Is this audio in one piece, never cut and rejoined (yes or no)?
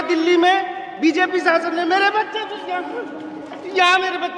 no